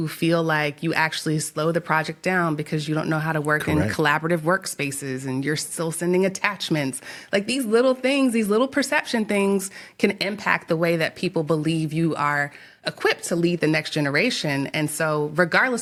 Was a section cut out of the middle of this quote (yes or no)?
no